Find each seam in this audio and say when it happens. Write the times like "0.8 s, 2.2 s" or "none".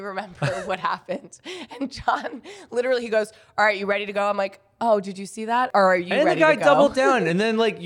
5.7 s